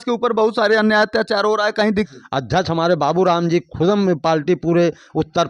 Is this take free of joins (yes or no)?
no